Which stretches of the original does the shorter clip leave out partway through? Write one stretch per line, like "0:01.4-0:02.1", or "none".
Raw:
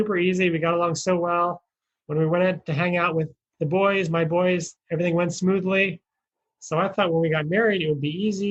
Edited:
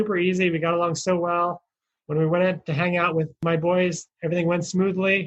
0:03.4-0:04.1